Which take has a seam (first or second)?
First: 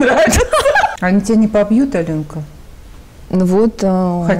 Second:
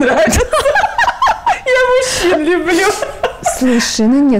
first